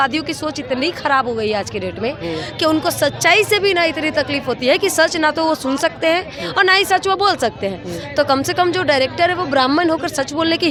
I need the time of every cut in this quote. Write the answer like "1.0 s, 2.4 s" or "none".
none